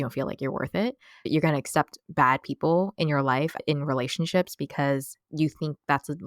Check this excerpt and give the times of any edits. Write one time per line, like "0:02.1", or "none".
0:01.3
0:05.3